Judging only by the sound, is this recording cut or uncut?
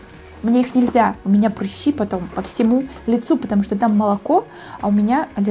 uncut